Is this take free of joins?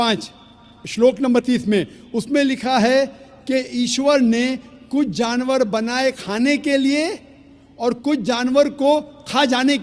yes; 0 cuts

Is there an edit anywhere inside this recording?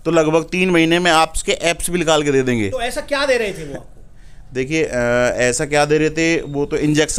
no; 0 cuts

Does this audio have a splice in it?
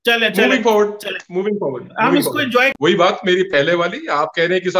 yes; 1 cut; at 2.7 s

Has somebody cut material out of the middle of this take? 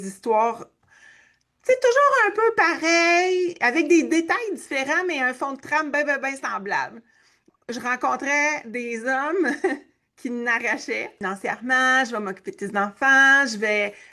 yes; 2 cuts; at 7.6 s, 11.2 s

